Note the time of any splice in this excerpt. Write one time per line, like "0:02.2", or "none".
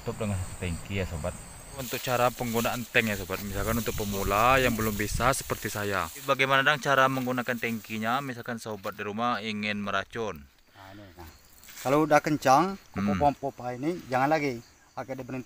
0:01.9
0:06.2
0:11.3